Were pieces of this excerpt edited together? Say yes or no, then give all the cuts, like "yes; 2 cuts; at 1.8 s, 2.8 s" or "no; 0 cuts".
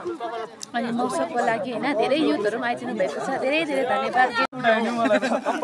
yes; 1 cut; at 4.4 s